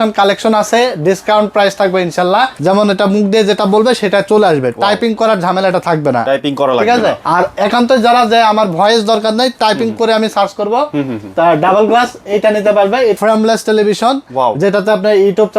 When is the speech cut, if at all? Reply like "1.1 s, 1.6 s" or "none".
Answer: 2.6 s, 7.2 s, 13.2 s